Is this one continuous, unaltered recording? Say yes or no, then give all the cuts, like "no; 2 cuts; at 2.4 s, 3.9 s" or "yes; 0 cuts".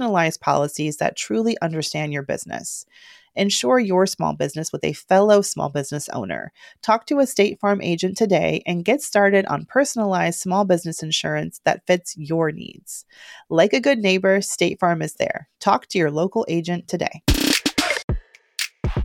no; 1 cut; at 18.1 s